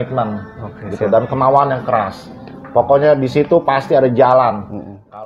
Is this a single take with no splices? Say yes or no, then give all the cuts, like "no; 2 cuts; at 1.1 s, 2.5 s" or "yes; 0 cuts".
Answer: yes; 0 cuts